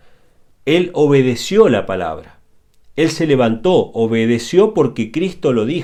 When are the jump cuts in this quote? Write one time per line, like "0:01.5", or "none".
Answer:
none